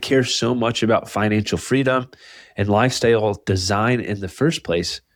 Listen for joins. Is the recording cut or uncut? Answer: uncut